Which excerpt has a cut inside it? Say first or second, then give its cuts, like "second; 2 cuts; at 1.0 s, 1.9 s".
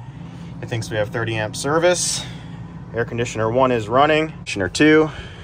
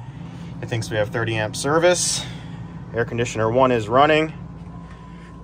first; 1 cut; at 4.5 s